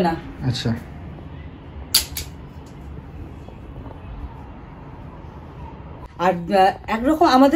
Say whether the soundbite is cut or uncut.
cut